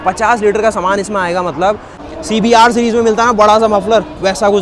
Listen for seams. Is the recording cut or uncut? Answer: cut